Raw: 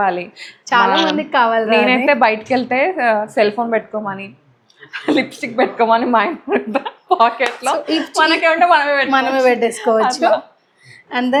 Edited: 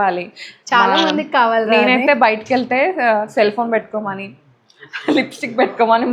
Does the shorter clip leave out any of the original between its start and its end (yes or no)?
no